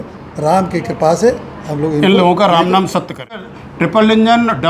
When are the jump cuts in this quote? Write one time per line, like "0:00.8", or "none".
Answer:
0:03.5